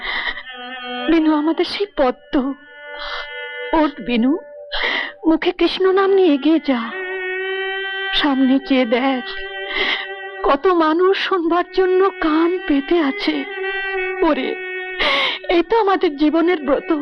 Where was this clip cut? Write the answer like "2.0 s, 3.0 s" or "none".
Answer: none